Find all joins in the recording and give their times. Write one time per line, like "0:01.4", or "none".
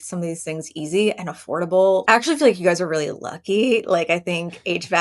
0:02.0